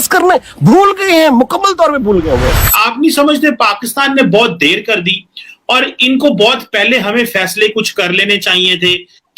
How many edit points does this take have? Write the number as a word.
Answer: one